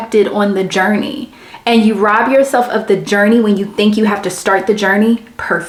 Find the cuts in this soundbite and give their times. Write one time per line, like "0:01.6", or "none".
none